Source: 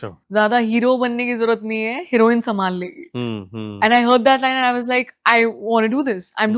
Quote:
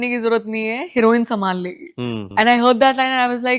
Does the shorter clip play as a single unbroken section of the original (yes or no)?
no